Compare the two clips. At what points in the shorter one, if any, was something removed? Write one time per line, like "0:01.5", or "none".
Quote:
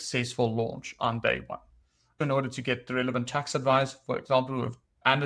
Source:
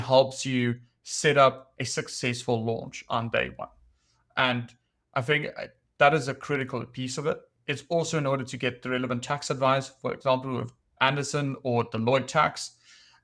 0:02.2